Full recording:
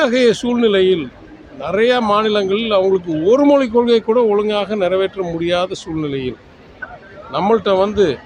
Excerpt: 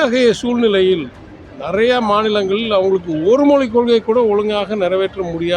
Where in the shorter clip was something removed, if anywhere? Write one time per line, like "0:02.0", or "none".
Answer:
none

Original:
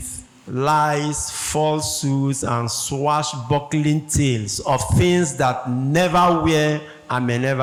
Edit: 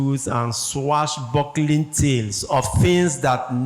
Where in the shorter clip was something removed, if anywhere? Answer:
none

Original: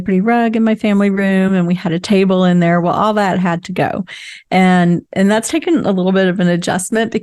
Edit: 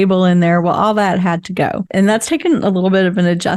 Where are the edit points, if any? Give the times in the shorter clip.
0:01.9

